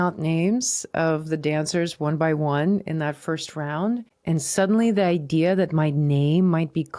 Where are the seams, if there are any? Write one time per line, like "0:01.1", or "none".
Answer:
none